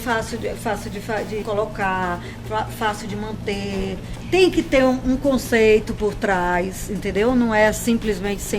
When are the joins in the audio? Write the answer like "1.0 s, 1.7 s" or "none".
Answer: 1.4 s, 4.1 s